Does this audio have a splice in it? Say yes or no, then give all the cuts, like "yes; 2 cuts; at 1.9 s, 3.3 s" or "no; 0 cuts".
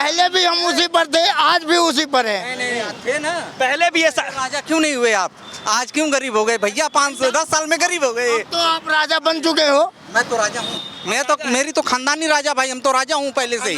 no; 0 cuts